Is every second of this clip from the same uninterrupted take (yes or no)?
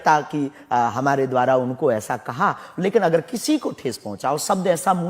yes